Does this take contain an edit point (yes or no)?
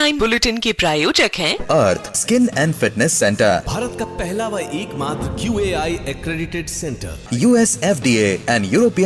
no